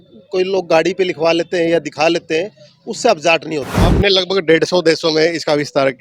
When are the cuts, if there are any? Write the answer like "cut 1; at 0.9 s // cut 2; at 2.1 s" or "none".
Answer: cut 1; at 3.7 s

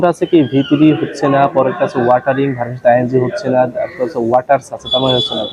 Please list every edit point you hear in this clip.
none

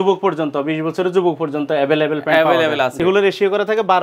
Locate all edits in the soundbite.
cut 1; at 3.0 s

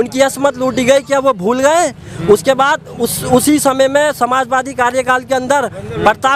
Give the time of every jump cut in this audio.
none

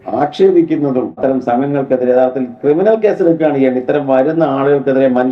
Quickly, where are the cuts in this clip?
cut 1; at 1.2 s

